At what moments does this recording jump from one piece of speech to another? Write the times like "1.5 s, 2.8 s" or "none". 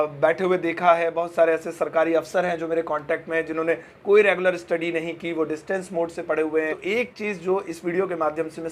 6.8 s